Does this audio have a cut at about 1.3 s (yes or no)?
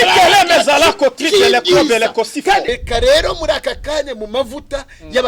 no